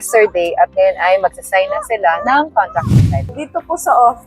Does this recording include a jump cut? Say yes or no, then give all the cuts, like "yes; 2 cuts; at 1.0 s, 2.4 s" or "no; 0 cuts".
yes; 1 cut; at 3.2 s